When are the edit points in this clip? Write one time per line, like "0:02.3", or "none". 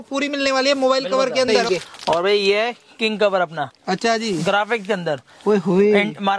0:01.6